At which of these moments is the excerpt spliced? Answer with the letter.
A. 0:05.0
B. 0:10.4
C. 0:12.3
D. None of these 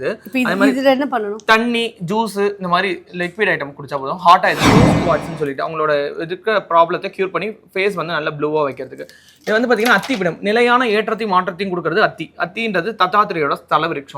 A